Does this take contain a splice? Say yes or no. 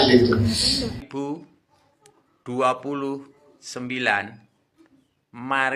yes